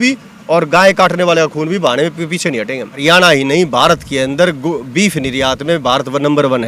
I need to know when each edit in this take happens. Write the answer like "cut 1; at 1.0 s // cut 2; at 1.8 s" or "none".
cut 1; at 2.9 s